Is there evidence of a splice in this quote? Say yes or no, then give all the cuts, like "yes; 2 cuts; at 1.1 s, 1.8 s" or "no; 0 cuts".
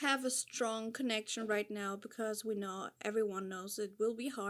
no; 0 cuts